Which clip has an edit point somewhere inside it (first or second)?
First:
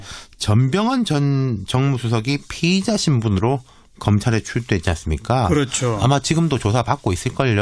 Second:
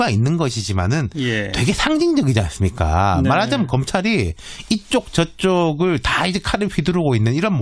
first